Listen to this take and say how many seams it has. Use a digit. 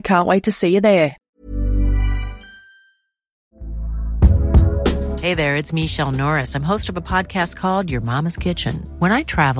2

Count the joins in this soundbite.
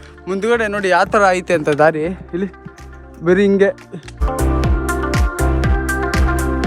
1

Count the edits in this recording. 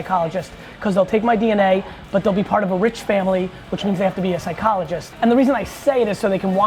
1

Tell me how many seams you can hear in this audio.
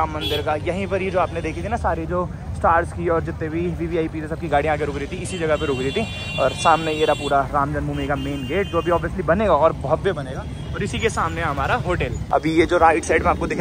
0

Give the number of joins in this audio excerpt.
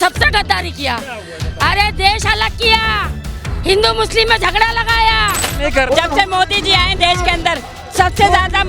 1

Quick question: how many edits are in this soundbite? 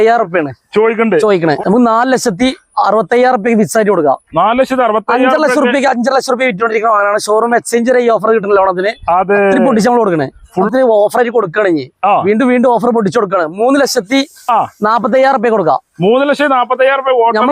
2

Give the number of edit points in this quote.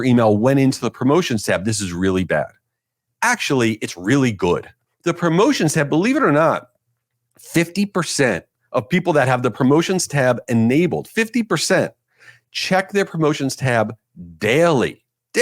1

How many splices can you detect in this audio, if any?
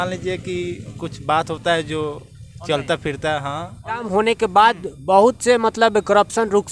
1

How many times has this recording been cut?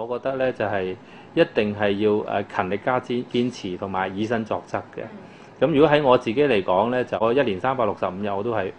1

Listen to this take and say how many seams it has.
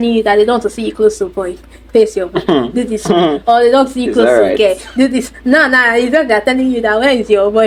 0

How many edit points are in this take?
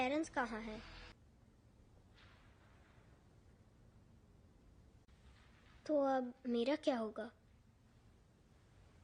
1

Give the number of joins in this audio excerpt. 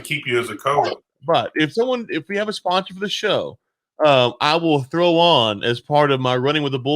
1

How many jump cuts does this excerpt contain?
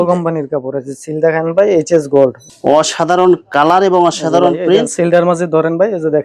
1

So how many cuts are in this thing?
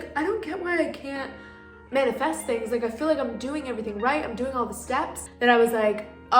1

